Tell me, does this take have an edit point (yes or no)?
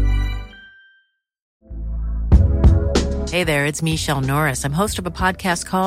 yes